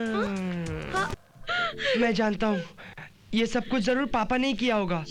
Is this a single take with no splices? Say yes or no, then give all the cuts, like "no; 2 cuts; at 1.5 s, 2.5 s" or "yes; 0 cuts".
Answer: no; 1 cut; at 1.2 s